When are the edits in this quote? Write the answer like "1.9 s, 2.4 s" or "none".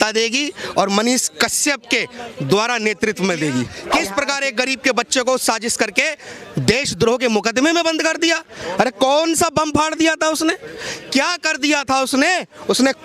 3.8 s

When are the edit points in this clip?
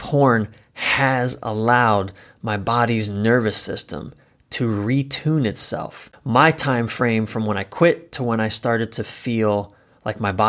6.1 s

